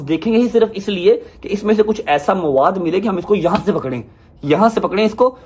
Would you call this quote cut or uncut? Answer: uncut